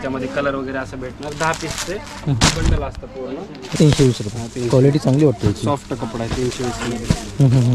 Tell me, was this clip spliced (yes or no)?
yes